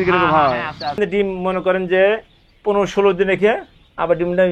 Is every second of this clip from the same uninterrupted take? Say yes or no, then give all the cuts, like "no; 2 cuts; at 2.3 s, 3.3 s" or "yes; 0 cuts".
no; 1 cut; at 1.0 s